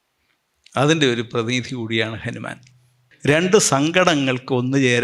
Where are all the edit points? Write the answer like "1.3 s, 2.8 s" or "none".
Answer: 3.1 s